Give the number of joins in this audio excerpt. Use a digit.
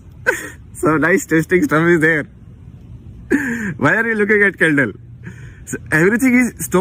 0